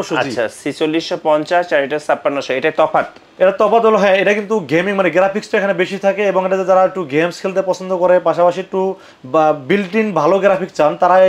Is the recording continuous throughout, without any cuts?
yes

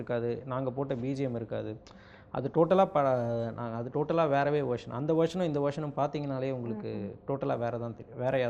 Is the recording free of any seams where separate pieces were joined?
yes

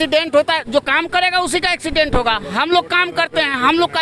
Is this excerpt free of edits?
yes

